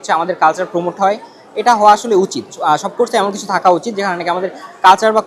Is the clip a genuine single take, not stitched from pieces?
yes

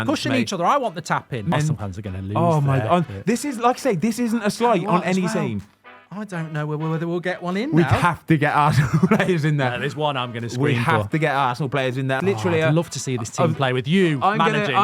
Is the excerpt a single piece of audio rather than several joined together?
no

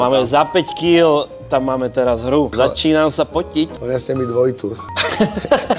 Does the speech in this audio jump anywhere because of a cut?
yes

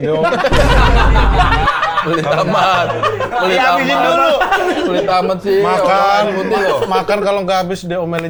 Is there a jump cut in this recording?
no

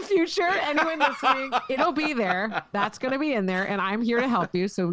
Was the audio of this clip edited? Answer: no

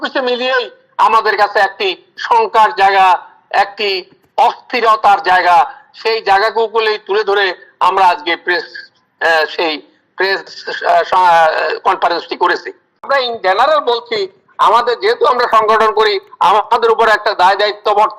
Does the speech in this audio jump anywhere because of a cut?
yes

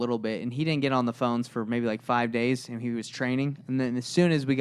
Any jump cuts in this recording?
no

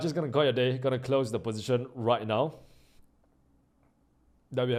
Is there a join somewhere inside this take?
no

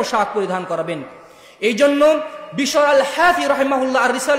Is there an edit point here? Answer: no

